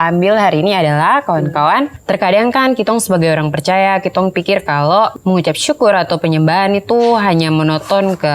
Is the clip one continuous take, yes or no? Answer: no